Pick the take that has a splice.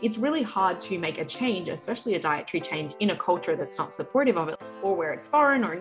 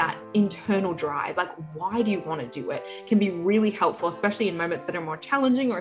first; 1 cut; at 4.5 s

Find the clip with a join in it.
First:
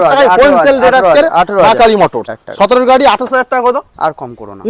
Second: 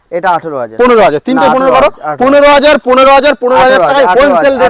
first; 1 cut; at 2.2 s

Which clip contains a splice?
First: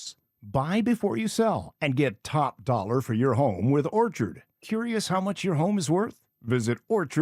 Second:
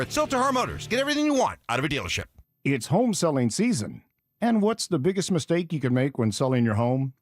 second; 1 cut; at 2.2 s

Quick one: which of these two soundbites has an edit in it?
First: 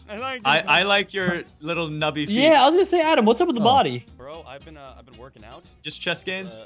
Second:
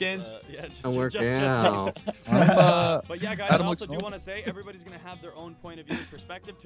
first; 1 cut; at 1.1 s

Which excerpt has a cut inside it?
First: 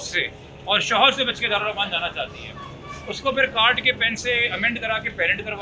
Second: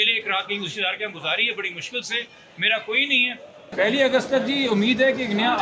second; 1 cut; at 3.7 s

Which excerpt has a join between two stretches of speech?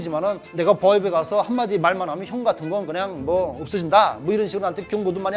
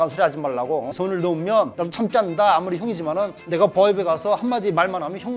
second; 1 cut; at 0.9 s

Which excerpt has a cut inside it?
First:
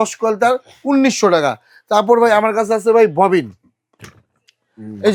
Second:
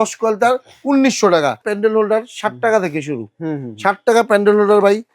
second; 1 cut; at 1.7 s

